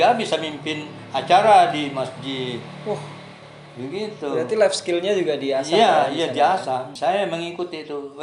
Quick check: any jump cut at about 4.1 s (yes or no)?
no